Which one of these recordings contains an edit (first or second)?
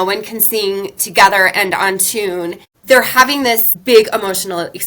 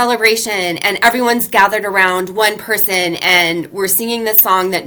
first